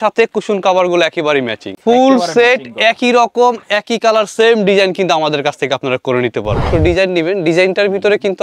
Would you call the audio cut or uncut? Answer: cut